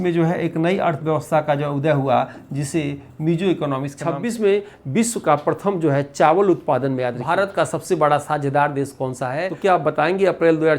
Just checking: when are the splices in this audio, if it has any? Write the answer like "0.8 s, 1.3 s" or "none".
3.9 s, 7.2 s, 9.5 s

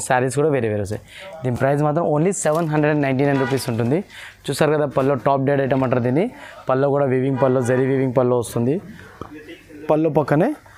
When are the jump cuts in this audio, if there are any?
none

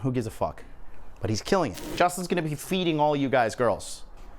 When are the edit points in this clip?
1.9 s

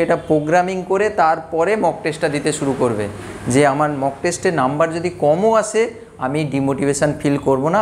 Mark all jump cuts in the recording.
none

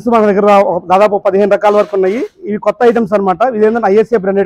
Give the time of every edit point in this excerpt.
none

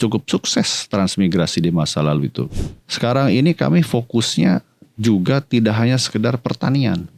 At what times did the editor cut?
2.4 s

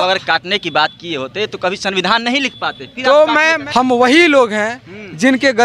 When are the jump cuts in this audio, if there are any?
3.6 s

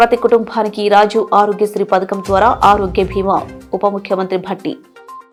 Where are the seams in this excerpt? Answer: none

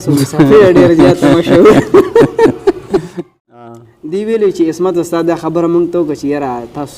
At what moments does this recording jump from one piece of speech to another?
3.3 s

